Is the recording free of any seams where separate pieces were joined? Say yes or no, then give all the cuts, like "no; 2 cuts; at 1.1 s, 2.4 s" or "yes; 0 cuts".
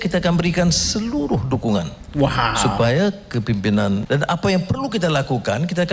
no; 1 cut; at 4.0 s